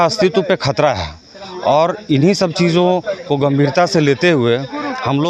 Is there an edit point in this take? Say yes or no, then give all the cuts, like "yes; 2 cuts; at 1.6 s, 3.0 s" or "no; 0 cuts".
no; 0 cuts